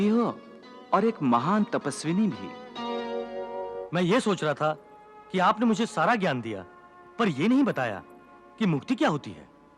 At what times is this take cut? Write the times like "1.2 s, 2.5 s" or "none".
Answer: 3.7 s